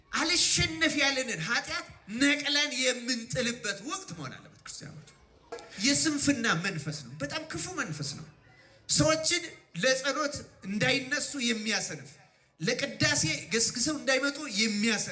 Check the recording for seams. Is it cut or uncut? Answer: cut